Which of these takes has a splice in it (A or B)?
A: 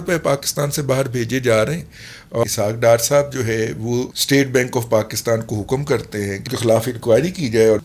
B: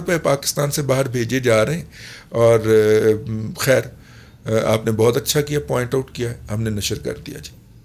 A